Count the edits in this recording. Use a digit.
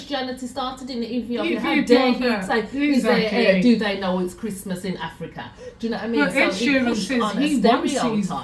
0